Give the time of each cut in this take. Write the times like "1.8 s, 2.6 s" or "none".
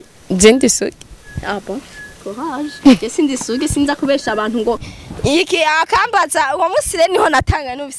4.9 s